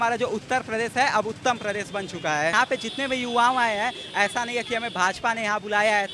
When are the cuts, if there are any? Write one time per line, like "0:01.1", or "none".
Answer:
0:02.5